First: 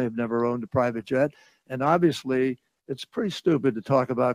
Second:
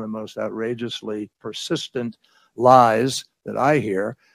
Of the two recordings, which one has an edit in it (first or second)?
second